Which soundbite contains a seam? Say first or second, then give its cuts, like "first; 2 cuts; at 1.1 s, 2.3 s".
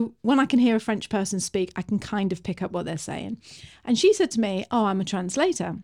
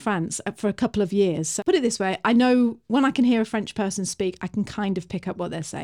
second; 1 cut; at 1.5 s